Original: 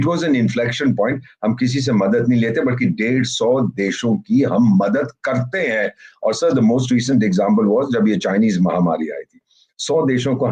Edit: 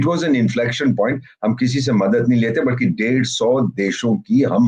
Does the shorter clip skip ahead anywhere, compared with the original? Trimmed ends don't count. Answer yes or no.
no